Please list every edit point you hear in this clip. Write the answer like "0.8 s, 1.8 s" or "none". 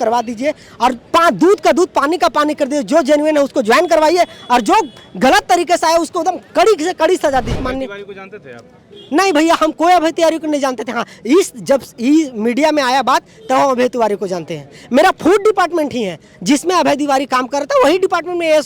7.6 s